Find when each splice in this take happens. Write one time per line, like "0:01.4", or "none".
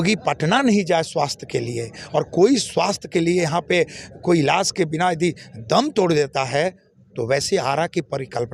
none